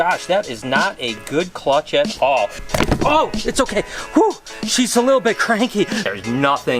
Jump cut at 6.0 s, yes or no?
yes